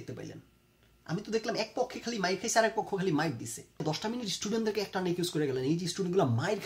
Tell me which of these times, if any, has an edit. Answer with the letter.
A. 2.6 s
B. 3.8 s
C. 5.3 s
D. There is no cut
B